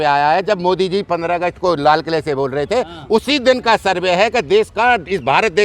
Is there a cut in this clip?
no; 0 cuts

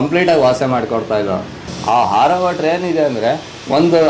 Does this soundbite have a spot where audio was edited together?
yes; 1 cut; at 1.6 s

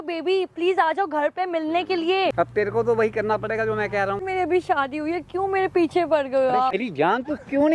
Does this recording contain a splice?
yes; 3 cuts; at 2.3 s, 4.2 s, 6.7 s

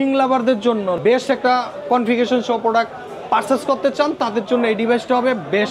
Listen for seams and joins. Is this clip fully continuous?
no; 1 cut; at 1.0 s

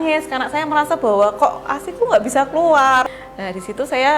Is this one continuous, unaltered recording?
no; 1 cut; at 3.1 s

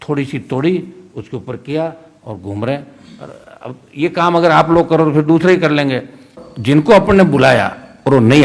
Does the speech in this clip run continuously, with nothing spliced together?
no; 1 cut; at 6.5 s

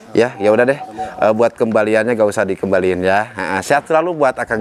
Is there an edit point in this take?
no; 0 cuts

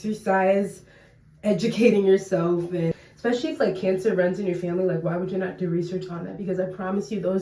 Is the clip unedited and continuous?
no; 1 cut; at 3.0 s

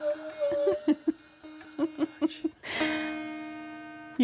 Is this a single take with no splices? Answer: no; 1 cut; at 2.6 s

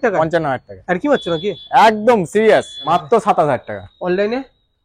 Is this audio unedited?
no; 1 cut; at 2.8 s

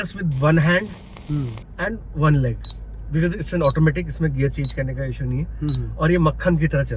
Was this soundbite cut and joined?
no; 0 cuts

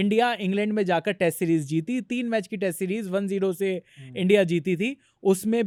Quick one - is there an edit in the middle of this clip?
no; 0 cuts

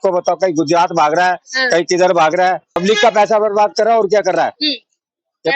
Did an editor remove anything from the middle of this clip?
yes; 1 cut; at 2.7 s

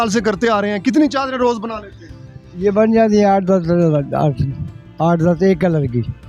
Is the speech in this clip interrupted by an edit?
no; 0 cuts

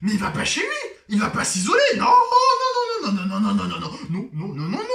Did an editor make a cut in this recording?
no; 0 cuts

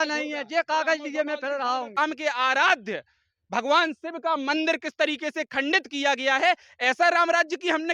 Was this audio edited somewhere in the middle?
yes; 1 cut; at 2.0 s

